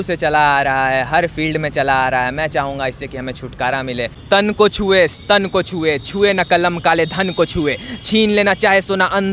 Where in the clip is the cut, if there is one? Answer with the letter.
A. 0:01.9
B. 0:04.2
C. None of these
B